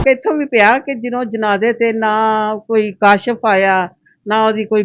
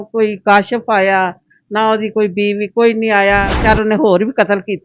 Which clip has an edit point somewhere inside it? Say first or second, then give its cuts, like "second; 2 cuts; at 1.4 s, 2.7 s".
second; 1 cut; at 3.6 s